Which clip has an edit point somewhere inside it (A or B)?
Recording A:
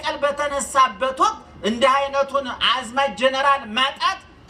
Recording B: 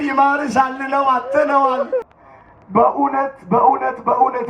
B